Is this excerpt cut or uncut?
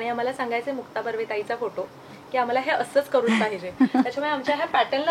uncut